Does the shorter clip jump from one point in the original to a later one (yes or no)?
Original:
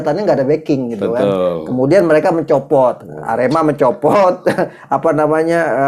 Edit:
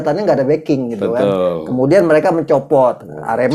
no